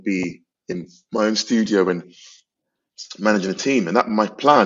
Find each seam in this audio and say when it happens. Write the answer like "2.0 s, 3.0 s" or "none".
0.9 s